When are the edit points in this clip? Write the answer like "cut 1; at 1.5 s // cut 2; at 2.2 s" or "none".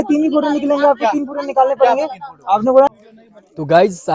cut 1; at 2.9 s

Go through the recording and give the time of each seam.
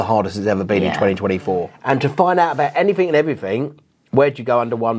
cut 1; at 1.7 s

